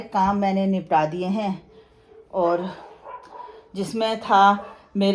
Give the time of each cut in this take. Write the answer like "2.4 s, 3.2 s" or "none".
none